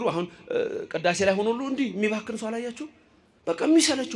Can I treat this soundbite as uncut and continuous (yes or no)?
yes